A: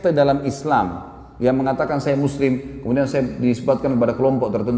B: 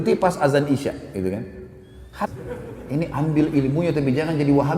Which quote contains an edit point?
B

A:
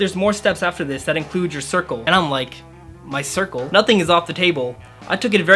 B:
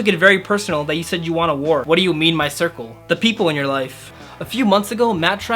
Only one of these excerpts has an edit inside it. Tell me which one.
B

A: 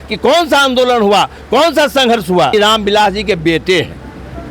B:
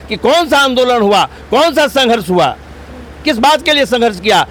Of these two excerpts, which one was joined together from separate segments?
A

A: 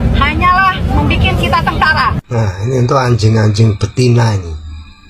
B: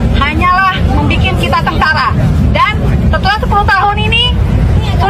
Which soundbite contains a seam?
B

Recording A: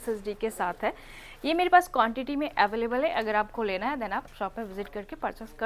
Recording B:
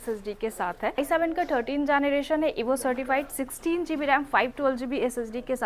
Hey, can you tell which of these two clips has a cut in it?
B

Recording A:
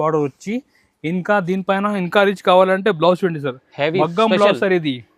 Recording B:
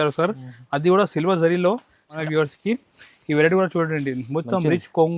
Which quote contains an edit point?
B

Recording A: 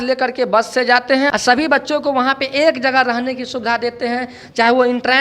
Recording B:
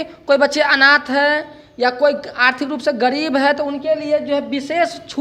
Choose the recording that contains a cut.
A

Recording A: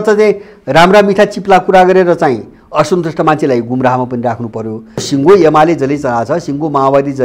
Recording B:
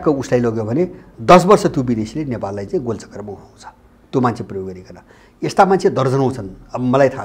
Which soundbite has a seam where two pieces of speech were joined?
A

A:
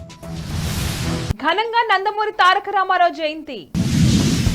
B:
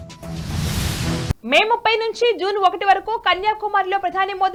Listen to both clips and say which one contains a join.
A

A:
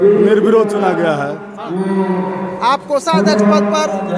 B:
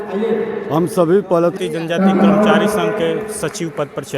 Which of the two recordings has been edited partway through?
B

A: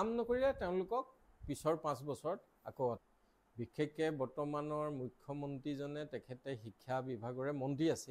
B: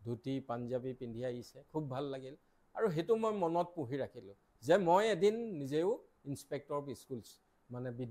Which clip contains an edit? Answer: A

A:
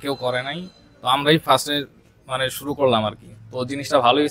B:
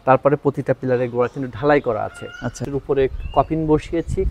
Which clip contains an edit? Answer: B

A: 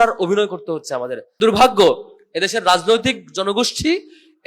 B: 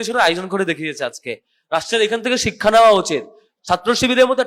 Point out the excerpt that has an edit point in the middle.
A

